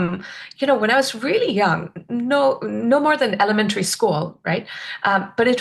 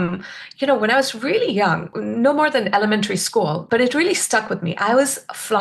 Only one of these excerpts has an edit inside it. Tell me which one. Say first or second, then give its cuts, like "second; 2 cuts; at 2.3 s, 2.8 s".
second; 2 cuts; at 2.0 s, 3.6 s